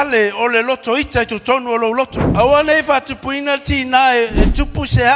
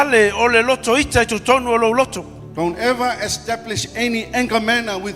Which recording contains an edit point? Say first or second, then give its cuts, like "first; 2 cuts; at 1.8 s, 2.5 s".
first; 1 cut; at 2.2 s